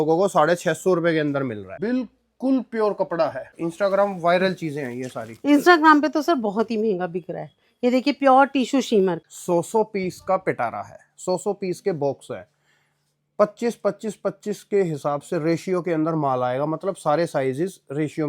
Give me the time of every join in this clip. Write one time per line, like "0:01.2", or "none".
0:01.7
0:03.5
0:09.3